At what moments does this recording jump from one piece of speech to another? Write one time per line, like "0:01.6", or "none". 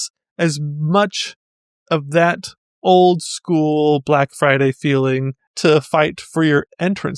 0:05.5